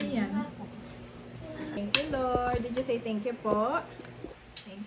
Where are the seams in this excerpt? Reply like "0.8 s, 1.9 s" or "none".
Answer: 1.8 s